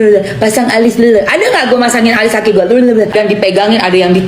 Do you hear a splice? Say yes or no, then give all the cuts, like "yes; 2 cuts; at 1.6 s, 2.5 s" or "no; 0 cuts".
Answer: yes; 1 cut; at 3.1 s